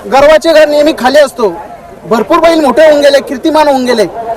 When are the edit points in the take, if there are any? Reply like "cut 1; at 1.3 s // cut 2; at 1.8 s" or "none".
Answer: none